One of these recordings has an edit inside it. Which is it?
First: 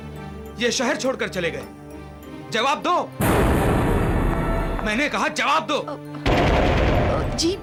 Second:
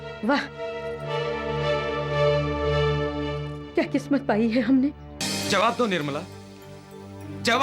second; 1 cut; at 5.1 s

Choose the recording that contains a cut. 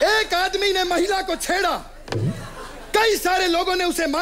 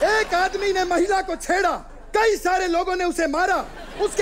second; 1 cut; at 1.9 s

